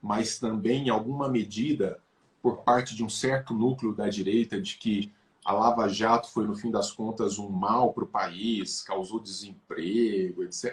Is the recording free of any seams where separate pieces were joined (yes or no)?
yes